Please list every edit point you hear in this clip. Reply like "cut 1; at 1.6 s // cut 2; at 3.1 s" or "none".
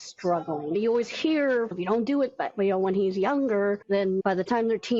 cut 1; at 0.7 s // cut 2; at 1.7 s // cut 3; at 4.2 s